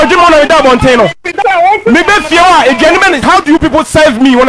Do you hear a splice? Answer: yes; 1 cut; at 1.3 s

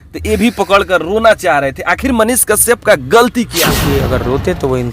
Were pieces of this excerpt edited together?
yes; 1 cut; at 3.6 s

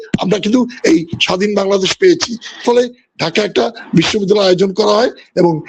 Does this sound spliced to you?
yes; 1 cut; at 2.6 s

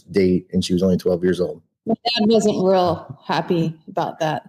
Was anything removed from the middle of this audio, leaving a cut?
yes; 1 cut; at 1.7 s

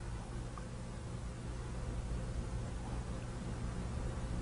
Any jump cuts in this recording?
yes; 1 cut; at 2.8 s

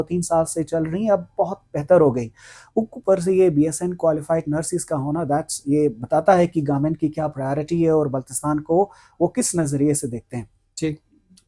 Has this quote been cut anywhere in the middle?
no; 0 cuts

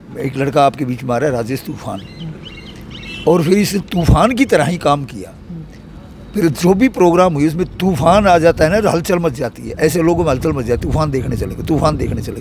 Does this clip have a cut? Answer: no; 0 cuts

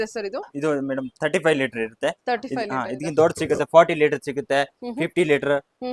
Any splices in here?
no; 0 cuts

